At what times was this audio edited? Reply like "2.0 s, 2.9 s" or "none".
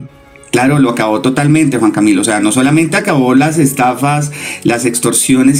none